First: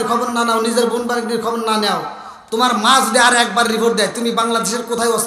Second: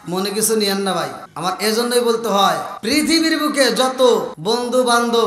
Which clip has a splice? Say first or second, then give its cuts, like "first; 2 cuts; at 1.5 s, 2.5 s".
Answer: second; 3 cuts; at 1.2 s, 2.7 s, 4.3 s